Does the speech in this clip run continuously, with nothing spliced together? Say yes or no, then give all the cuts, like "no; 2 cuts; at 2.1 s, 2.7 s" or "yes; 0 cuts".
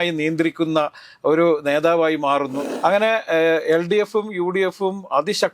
no; 1 cut; at 2.6 s